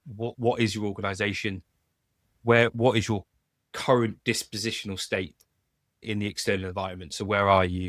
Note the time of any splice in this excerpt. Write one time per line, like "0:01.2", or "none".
0:06.0

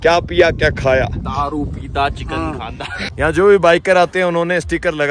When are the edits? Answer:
0:03.0

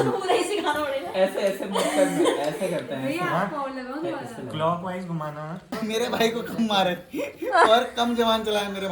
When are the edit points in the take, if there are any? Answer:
0:05.6

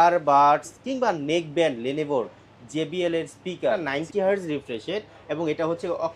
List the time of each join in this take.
0:03.8

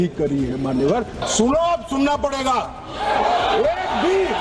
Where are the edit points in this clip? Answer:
0:01.2

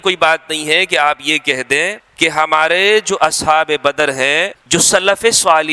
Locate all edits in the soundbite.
0:02.0
0:04.6

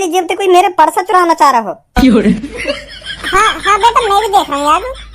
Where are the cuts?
0:02.3

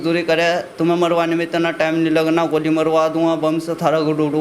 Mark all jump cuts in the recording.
none

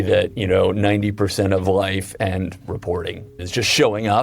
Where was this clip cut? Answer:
0:03.3

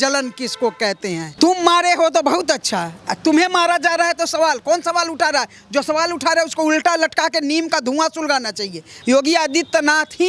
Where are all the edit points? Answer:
0:01.3
0:08.9

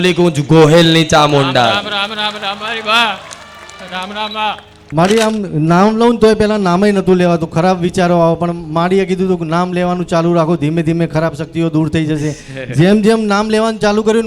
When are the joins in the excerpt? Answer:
0:04.7

